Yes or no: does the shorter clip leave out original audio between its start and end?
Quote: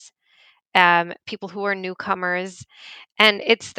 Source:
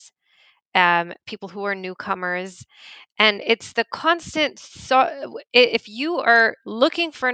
no